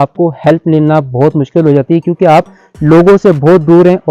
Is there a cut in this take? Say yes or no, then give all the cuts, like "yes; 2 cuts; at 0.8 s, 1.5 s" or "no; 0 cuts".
no; 0 cuts